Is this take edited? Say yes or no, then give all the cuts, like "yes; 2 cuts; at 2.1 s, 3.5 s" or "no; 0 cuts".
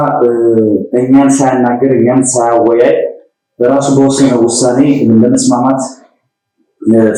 no; 0 cuts